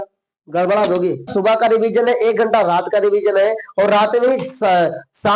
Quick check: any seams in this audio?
yes; 1 cut; at 1.3 s

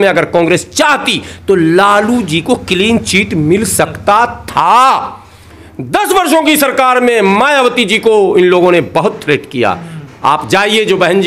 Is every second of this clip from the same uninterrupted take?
yes; 0 cuts

